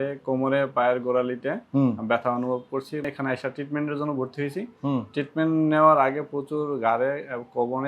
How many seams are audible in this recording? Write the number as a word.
one